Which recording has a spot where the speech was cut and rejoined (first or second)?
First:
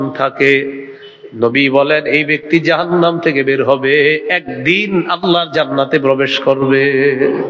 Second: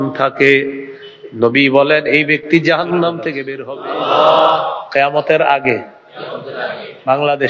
second